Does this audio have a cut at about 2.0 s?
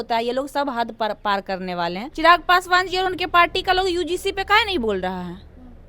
yes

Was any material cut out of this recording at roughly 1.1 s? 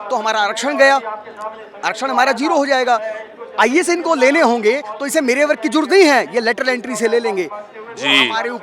no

